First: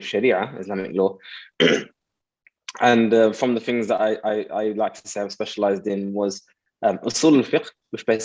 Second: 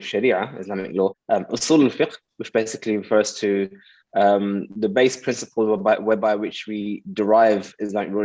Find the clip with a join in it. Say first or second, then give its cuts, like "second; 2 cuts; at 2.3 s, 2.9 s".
second; 1 cut; at 1.2 s